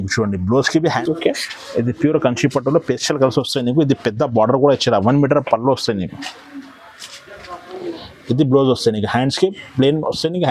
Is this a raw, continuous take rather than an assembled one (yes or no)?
no